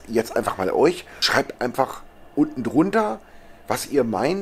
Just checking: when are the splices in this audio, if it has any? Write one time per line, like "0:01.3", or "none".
0:01.2